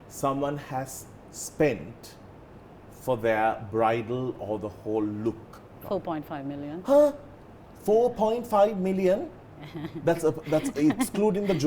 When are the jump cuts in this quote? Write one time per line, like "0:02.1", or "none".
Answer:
0:05.7